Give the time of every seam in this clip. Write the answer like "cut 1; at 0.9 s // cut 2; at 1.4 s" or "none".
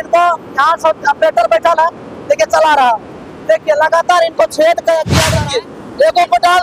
cut 1; at 5.2 s